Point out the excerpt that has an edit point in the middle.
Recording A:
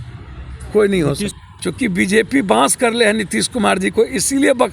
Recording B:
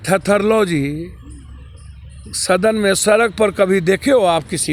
A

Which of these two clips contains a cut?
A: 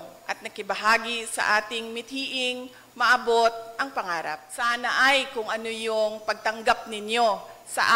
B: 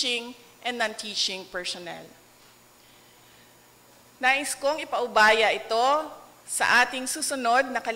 A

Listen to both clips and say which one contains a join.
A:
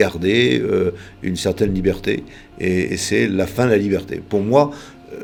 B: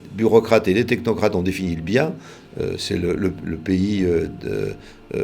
B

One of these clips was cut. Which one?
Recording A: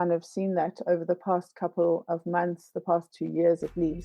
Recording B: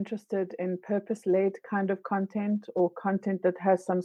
A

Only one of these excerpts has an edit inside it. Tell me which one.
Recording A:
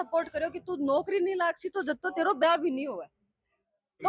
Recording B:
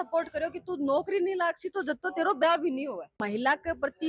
B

